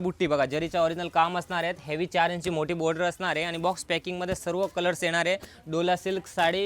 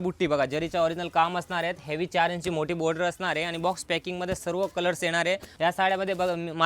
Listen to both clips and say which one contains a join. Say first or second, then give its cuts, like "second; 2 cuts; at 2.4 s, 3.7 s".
second; 1 cut; at 5.5 s